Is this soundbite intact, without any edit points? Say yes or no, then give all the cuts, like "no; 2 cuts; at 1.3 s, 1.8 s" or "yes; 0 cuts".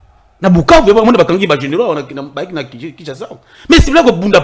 yes; 0 cuts